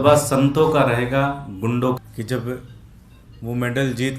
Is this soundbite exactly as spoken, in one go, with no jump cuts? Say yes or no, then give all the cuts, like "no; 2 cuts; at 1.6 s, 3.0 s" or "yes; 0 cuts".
no; 1 cut; at 2.0 s